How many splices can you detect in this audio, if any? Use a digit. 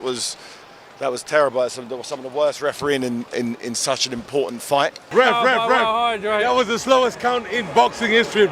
1